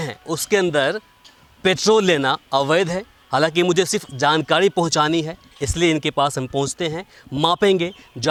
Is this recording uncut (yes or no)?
yes